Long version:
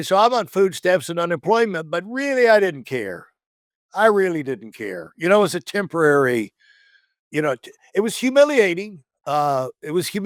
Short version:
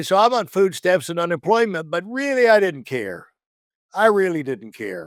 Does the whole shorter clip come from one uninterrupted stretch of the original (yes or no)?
yes